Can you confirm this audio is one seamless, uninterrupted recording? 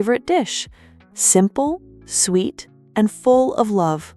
yes; 0 cuts

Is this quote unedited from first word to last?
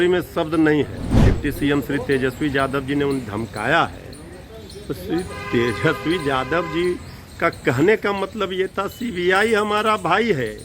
no; 1 cut; at 1.1 s

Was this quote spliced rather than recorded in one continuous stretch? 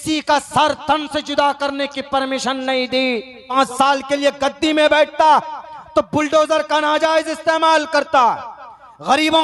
yes; 1 cut; at 3.5 s

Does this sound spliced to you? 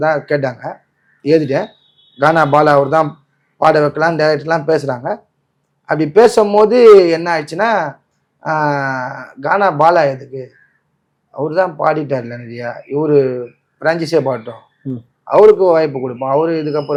no; 0 cuts

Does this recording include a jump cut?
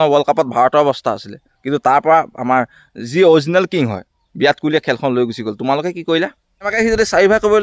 yes; 1 cut; at 6.7 s

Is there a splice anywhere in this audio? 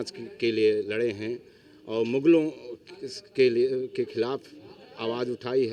no; 0 cuts

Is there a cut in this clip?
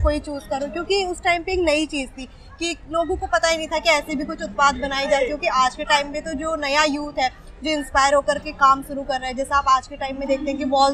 no; 0 cuts

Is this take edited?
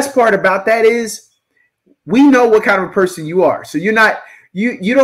no; 0 cuts

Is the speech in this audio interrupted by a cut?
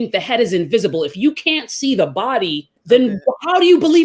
yes; 1 cut; at 2.8 s

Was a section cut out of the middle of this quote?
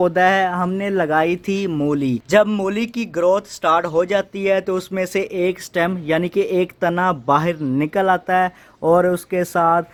no; 0 cuts

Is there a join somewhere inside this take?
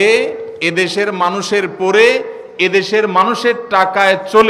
no; 0 cuts

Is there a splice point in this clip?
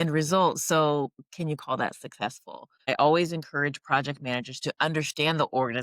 yes; 1 cut; at 2.9 s

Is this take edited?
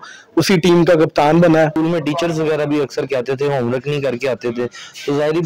yes; 1 cut; at 1.7 s

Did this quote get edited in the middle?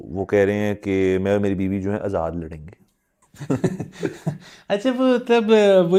no; 0 cuts

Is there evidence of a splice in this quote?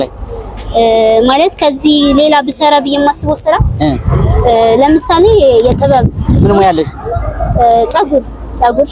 no; 0 cuts

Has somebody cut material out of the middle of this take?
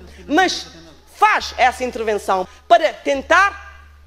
yes; 1 cut; at 2.5 s

